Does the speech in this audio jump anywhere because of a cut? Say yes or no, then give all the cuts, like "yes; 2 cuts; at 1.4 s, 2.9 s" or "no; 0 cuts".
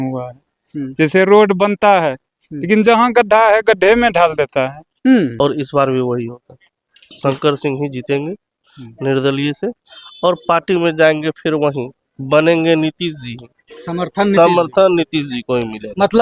yes; 1 cut; at 5.3 s